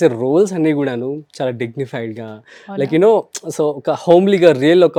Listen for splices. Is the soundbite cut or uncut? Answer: uncut